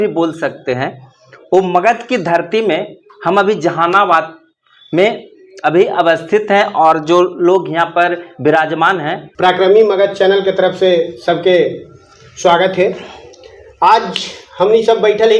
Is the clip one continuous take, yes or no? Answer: no